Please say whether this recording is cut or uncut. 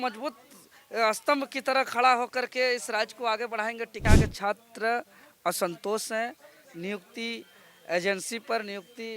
cut